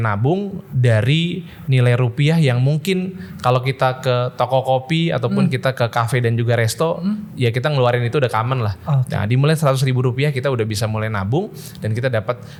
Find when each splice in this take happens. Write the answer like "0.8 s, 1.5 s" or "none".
none